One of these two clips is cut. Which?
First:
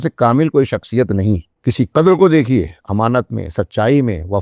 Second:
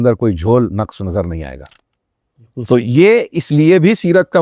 first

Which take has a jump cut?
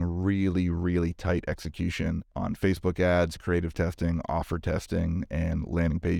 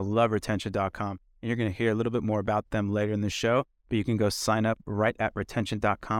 first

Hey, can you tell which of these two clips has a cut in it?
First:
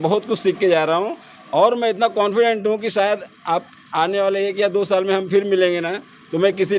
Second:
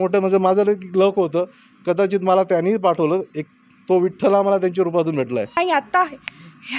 second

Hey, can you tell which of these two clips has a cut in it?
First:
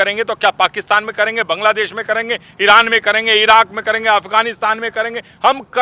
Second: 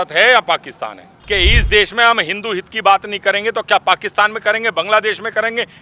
second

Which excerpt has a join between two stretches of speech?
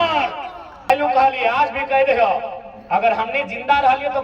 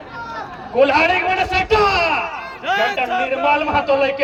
first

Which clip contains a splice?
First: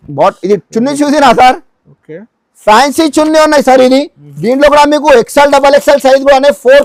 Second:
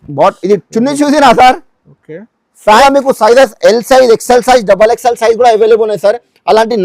second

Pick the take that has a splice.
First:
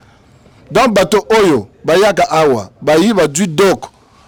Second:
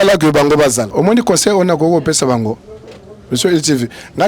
second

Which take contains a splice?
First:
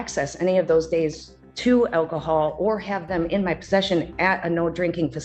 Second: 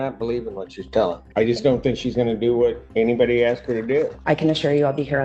second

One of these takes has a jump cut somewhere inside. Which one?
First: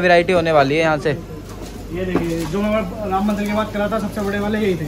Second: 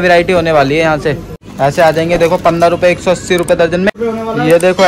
second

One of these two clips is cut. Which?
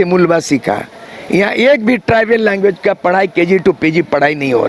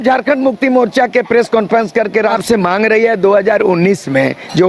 second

